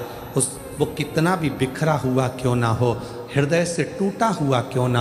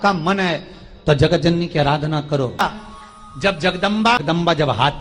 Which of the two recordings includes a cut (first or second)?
second